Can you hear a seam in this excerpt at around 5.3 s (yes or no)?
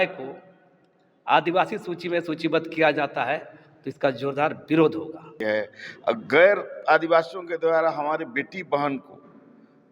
yes